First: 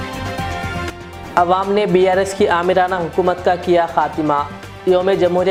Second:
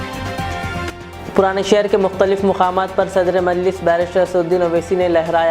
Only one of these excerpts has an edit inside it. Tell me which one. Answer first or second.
second